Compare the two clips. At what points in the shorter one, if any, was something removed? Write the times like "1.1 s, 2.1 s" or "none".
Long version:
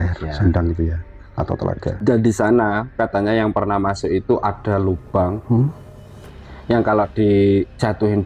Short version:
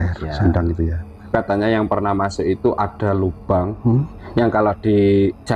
1.2 s, 4.2 s